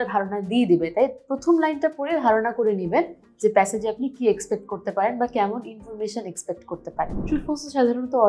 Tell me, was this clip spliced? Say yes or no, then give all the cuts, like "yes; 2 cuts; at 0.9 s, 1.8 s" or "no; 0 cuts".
yes; 1 cut; at 7.2 s